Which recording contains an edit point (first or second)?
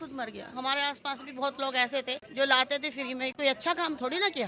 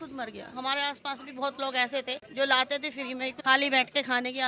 second